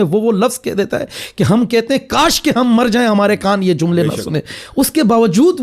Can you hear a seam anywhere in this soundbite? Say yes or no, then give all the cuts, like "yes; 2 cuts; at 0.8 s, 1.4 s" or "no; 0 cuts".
no; 0 cuts